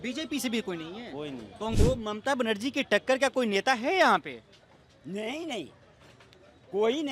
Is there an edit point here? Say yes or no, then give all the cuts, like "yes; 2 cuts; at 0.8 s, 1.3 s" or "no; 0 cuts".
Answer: yes; 1 cut; at 1.8 s